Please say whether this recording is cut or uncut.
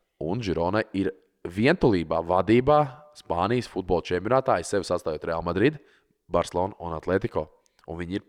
uncut